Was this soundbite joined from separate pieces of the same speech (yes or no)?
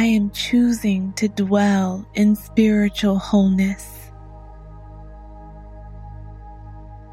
yes